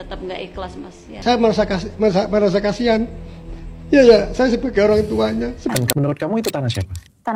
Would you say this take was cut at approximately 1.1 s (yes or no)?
yes